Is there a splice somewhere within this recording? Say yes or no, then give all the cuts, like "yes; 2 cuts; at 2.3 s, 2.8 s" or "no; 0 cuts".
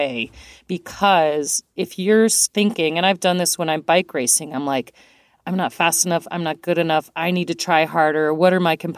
yes; 2 cuts; at 1.6 s, 2.4 s